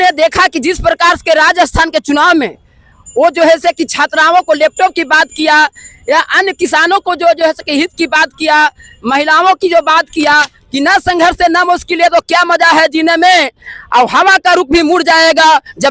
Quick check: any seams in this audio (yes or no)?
yes